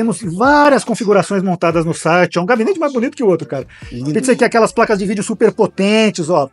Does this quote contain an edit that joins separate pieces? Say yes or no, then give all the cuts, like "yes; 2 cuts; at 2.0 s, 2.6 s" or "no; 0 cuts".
no; 0 cuts